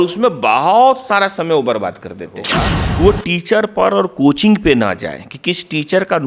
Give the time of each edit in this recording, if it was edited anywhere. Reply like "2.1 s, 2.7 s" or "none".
2.4 s